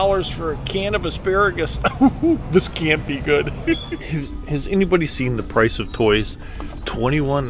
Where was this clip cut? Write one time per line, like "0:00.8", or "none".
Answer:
none